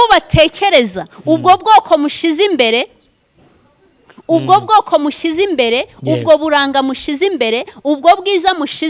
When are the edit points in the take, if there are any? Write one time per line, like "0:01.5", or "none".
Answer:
none